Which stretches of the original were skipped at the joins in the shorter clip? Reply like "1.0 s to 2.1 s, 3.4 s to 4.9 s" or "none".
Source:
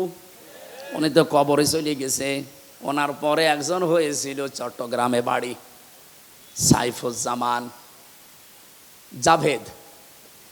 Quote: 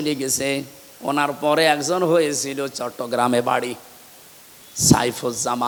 none